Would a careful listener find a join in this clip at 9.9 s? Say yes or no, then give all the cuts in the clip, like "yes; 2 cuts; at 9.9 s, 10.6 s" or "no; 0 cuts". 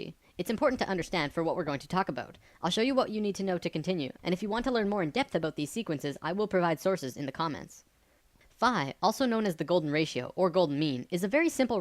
yes; 1 cut; at 9.9 s